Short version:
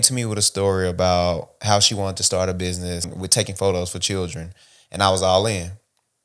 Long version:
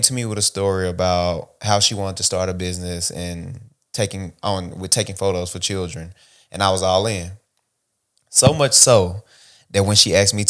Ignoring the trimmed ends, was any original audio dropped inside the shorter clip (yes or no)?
yes